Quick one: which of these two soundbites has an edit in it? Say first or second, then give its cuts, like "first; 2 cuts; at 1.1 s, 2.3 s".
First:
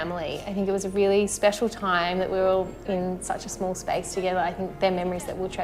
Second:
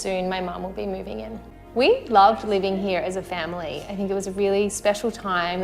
second; 1 cut; at 1.6 s